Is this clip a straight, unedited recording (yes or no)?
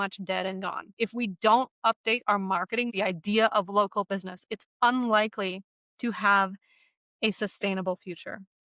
no